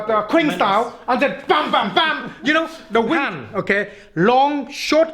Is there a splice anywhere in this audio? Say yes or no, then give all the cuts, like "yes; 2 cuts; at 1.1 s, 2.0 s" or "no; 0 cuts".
yes; 1 cut; at 3.2 s